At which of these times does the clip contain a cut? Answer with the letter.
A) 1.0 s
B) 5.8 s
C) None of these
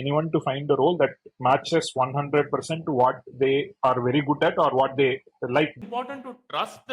B